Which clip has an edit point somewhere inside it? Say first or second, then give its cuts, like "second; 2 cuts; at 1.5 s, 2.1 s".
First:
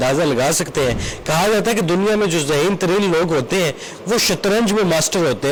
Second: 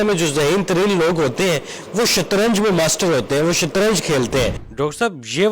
second; 1 cut; at 4.6 s